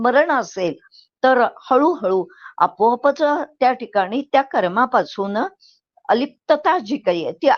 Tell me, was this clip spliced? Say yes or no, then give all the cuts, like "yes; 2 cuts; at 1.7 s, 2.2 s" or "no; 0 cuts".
no; 0 cuts